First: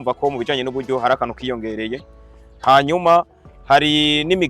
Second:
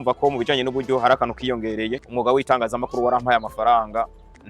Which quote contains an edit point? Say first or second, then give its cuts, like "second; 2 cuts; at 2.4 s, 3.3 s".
second; 1 cut; at 2.4 s